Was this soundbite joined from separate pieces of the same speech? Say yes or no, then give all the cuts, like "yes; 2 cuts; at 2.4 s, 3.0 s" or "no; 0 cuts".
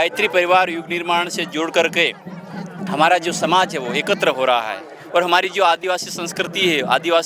no; 0 cuts